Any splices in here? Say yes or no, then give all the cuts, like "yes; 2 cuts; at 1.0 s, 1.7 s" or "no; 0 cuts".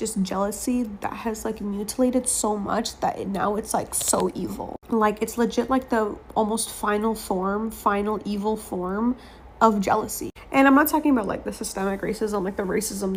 no; 0 cuts